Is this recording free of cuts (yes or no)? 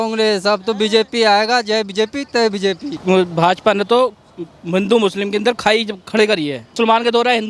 no